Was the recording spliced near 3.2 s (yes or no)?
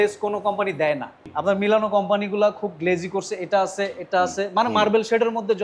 no